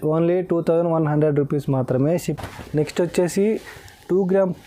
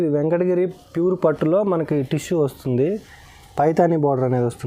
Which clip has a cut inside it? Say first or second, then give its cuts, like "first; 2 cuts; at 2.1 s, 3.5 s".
first; 1 cut; at 2.2 s